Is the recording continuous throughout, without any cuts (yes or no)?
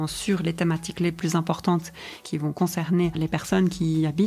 no